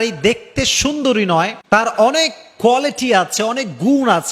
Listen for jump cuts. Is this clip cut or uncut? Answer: cut